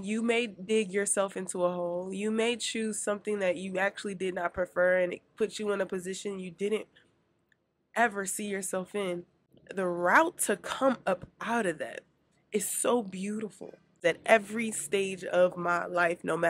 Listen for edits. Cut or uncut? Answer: cut